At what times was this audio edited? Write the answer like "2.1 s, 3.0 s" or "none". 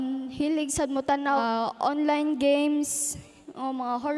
1.4 s